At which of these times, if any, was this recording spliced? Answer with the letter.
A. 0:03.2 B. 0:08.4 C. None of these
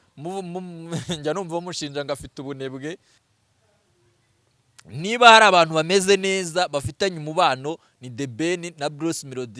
A